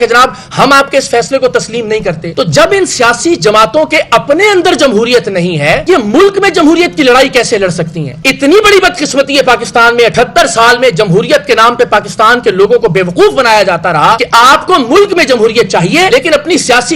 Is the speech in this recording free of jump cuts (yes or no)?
yes